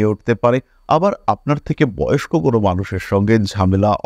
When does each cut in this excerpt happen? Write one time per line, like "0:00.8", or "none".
none